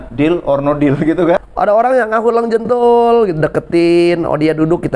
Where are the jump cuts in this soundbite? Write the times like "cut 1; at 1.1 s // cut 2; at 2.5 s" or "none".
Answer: cut 1; at 1.4 s